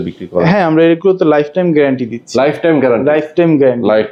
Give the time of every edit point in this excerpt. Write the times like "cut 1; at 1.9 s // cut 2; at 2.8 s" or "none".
none